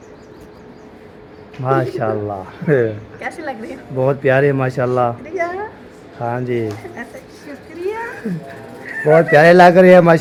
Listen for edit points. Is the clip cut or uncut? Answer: uncut